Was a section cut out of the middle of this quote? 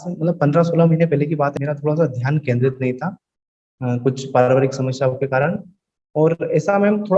yes; 1 cut; at 1.6 s

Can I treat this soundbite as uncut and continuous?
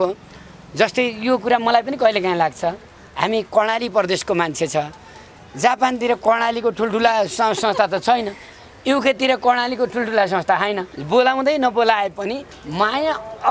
no; 1 cut; at 10.9 s

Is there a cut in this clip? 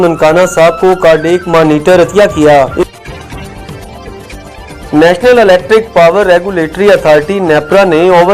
yes; 2 cuts; at 2.9 s, 4.9 s

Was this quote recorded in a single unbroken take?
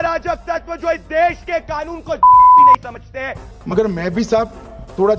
yes; 0 cuts

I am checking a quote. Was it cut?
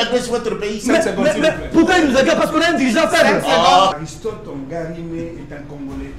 yes; 1 cut; at 3.9 s

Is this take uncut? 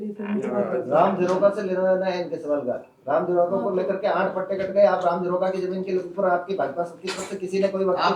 yes; 0 cuts

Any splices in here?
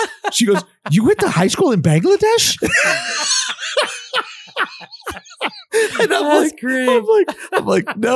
yes; 1 cut; at 5.6 s

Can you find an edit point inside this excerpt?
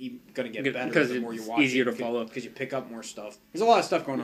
yes; 1 cut; at 3.1 s

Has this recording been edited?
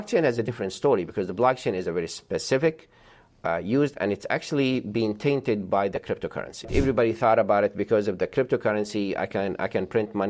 yes; 1 cut; at 6.7 s

